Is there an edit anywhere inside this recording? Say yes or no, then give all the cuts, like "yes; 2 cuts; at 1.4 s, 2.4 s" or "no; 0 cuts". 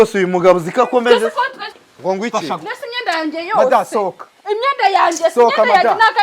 yes; 1 cut; at 1.8 s